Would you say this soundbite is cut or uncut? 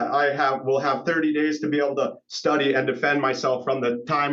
uncut